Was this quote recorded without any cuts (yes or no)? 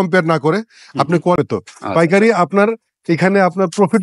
no